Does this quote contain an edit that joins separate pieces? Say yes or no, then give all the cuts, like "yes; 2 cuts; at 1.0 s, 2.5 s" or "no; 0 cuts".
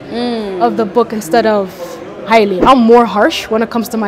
yes; 1 cut; at 2.6 s